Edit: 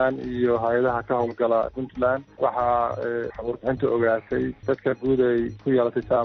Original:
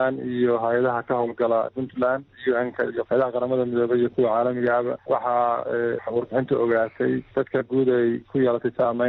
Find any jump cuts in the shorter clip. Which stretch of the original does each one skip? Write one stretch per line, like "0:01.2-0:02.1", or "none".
0:02.3-0:05.0